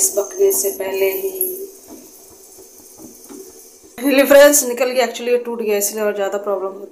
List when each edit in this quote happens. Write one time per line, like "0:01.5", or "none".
0:03.9